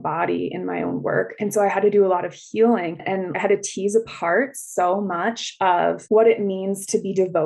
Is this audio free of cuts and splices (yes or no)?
no